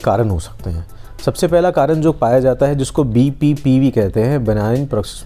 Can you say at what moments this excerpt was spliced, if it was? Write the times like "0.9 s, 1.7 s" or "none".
none